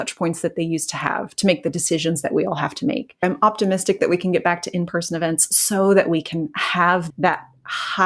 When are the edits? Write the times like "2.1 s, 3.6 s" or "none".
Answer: 3.2 s, 7.1 s